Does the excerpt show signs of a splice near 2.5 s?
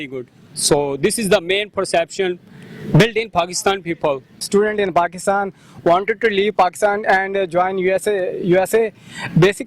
no; 1 cut; at 4.2 s

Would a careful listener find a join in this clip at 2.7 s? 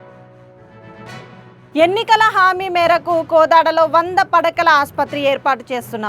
no; 1 cut; at 1.4 s

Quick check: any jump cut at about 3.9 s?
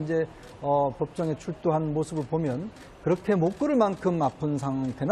yes; 1 cut; at 3.9 s

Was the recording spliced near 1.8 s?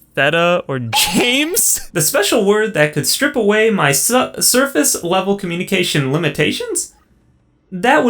yes; 1 cut; at 1.8 s

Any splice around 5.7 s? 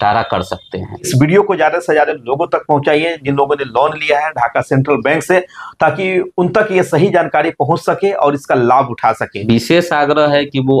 no; 2 cuts; at 1.0 s, 9.3 s

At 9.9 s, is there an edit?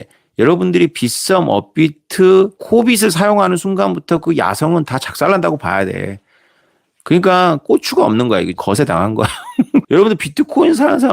yes; 2 cuts; at 8.6 s, 9.9 s

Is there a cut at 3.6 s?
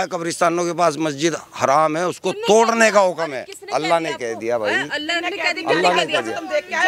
no; 0 cuts

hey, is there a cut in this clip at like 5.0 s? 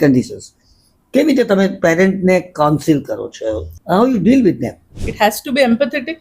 yes; 2 cuts; at 3.6 s, 5.0 s

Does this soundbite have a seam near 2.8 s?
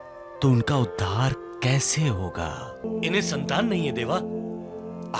yes; 1 cut; at 2.8 s

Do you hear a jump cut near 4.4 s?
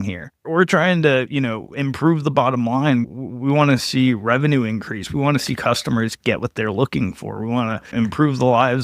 no; 1 cut; at 7.9 s

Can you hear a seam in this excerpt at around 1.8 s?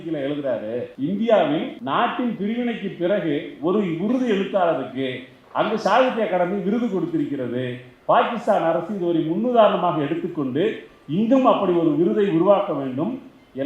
yes; 2 cuts; at 0.9 s, 1.8 s

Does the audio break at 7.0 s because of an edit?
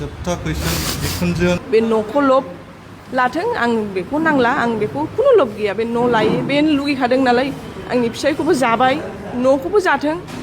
no; 1 cut; at 1.6 s

